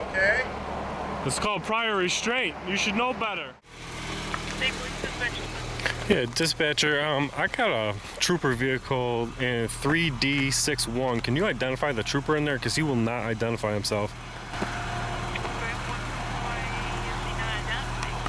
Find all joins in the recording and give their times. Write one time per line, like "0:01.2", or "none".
0:03.4